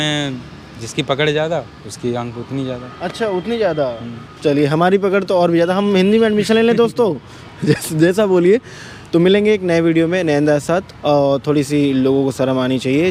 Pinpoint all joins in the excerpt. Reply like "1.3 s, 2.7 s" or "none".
none

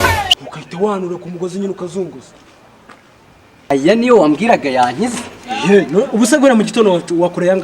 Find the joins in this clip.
3.7 s

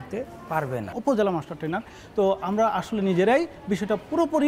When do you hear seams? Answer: 0.9 s

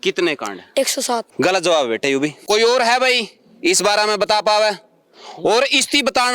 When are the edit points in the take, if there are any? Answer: 1.3 s, 2.4 s

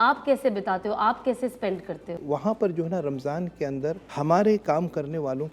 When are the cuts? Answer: 2.2 s, 4.1 s

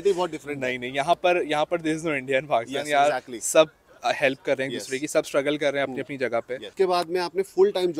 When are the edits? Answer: 6.6 s

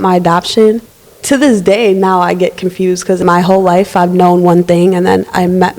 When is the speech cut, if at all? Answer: 0.9 s, 3.2 s

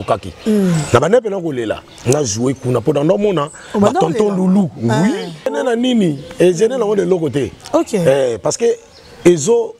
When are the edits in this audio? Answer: 5.5 s

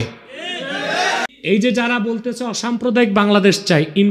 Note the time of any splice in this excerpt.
1.3 s

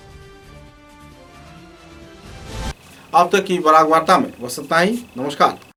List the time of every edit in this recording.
none

